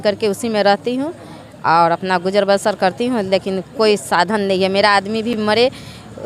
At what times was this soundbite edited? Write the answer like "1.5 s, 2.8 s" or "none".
none